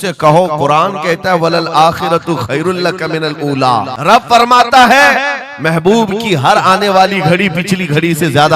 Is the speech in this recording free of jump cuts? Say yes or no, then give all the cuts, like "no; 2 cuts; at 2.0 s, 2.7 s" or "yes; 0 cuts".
no; 1 cut; at 3.9 s